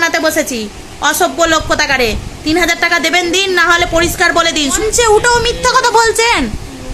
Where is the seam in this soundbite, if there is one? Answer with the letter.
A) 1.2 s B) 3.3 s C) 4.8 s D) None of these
C